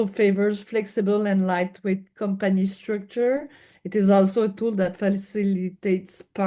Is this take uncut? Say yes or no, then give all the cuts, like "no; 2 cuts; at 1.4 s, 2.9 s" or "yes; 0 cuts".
yes; 0 cuts